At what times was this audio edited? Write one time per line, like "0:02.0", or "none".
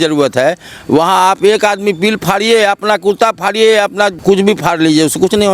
0:04.2